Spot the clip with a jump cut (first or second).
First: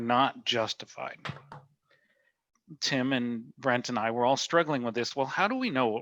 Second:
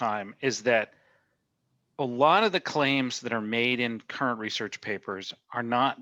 first